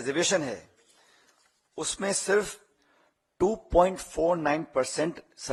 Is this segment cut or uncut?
uncut